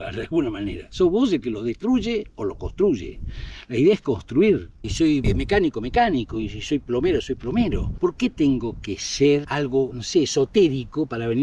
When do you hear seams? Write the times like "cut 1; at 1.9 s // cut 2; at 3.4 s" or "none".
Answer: cut 1; at 4.8 s // cut 2; at 7.9 s // cut 3; at 9.8 s